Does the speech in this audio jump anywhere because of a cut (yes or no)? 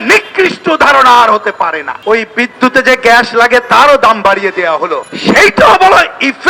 yes